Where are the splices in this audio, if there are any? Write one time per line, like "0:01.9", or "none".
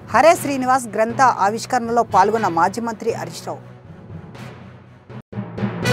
none